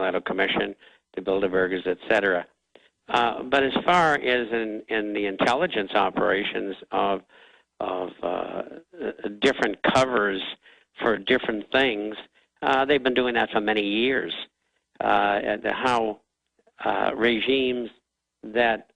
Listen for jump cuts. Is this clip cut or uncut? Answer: cut